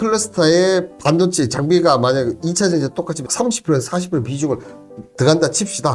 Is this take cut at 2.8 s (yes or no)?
no